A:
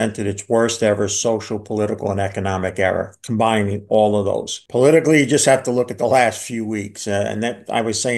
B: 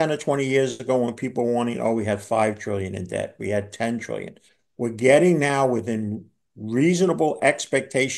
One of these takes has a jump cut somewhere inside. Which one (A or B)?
A